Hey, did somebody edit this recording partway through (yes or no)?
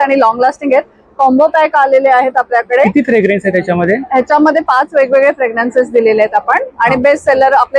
no